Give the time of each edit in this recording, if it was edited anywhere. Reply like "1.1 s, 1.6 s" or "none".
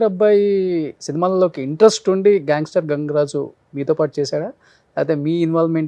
1.0 s